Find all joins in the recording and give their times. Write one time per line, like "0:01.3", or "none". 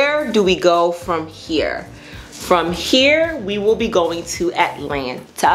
none